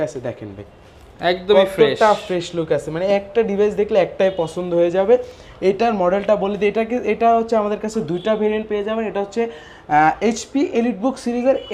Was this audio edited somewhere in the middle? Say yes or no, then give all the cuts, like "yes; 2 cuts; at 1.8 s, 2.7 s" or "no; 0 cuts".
no; 0 cuts